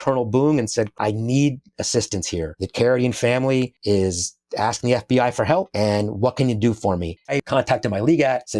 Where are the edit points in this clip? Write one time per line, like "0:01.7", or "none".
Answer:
0:00.9
0:03.8
0:07.3